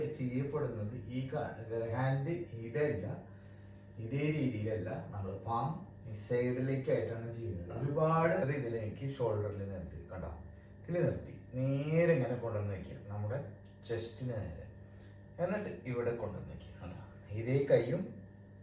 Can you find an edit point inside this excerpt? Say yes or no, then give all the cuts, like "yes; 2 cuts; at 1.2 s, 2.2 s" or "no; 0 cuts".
yes; 1 cut; at 8.4 s